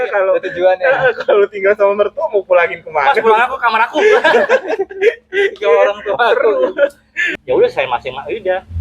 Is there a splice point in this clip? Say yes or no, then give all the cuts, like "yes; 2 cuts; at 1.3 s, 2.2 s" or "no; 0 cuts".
yes; 1 cut; at 7.2 s